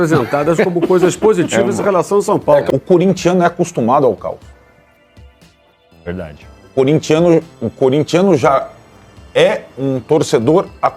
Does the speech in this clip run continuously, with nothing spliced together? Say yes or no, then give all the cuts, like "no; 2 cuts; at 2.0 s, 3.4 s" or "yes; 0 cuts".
no; 1 cut; at 2.7 s